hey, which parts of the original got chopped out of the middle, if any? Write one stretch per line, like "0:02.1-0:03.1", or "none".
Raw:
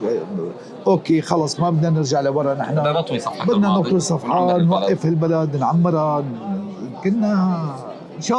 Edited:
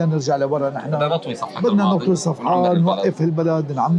none